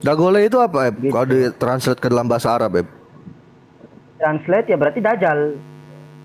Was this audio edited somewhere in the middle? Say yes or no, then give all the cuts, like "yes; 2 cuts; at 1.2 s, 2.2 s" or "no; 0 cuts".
no; 0 cuts